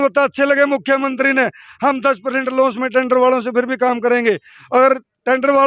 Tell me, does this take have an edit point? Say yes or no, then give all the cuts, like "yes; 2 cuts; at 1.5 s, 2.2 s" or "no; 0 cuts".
no; 0 cuts